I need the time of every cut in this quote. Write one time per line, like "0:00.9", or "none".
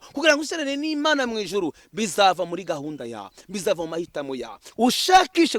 0:04.7